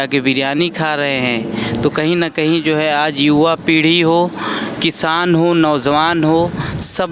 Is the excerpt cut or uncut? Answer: uncut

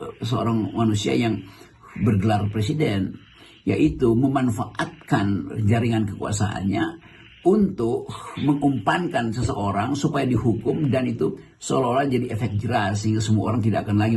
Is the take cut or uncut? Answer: uncut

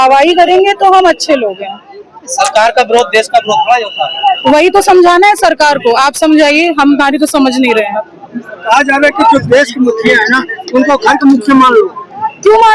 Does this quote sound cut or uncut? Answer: uncut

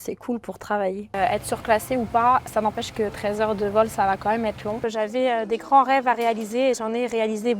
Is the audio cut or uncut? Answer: cut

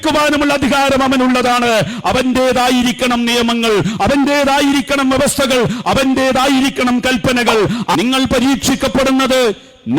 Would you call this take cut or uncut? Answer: cut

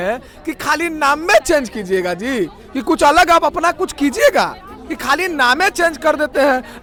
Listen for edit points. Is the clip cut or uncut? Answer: uncut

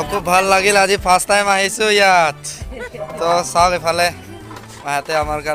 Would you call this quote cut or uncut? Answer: uncut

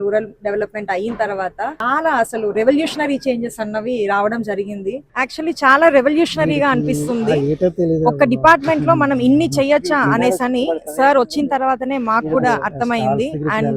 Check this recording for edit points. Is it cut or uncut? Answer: cut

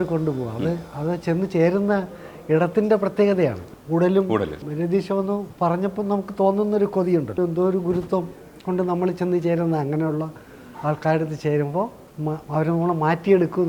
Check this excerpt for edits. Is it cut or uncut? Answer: cut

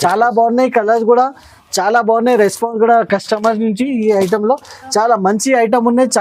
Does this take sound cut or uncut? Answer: uncut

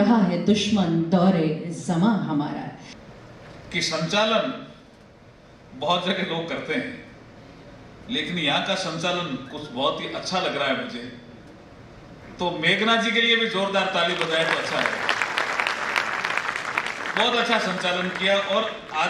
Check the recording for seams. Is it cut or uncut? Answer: cut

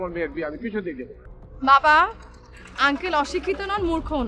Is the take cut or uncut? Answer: cut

